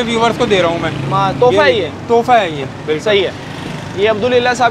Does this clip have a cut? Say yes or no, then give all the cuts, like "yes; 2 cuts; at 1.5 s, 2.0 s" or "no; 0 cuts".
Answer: no; 0 cuts